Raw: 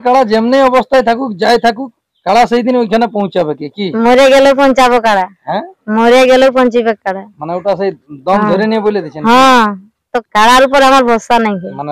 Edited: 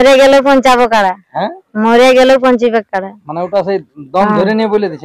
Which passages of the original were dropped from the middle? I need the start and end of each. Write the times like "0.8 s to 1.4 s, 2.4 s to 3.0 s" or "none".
none